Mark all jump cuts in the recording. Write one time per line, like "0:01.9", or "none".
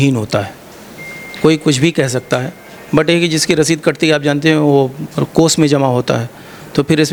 none